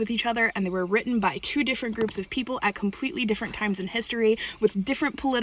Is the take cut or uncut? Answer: uncut